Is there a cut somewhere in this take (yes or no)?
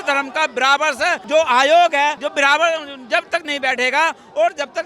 yes